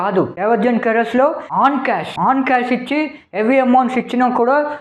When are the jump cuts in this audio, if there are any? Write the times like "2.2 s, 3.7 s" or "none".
none